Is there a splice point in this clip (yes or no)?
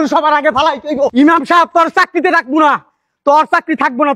yes